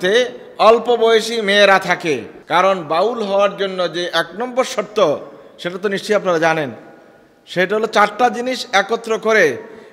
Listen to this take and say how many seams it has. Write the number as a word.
one